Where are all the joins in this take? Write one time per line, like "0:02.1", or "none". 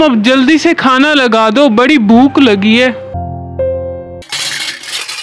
0:03.1
0:04.3